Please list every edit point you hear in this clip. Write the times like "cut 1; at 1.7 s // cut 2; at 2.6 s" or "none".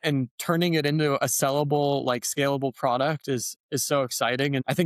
none